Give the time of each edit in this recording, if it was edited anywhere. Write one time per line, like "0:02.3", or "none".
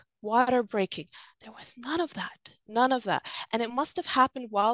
none